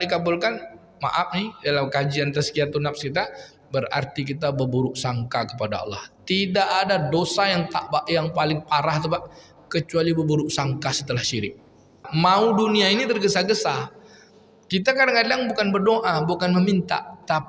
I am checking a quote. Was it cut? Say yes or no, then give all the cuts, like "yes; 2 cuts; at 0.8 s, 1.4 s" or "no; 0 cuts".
yes; 1 cut; at 12.1 s